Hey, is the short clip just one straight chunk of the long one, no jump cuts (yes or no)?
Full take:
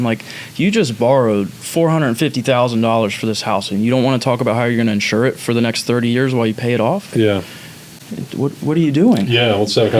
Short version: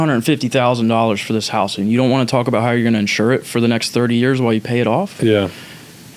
yes